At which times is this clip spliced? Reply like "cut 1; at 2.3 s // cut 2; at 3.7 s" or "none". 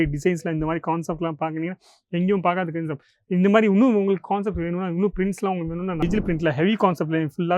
cut 1; at 6.0 s